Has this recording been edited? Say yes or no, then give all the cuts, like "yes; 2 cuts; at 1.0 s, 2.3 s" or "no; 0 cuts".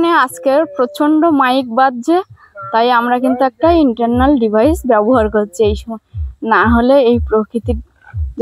no; 0 cuts